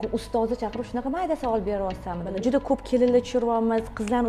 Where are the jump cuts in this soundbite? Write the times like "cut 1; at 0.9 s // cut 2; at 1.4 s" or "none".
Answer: none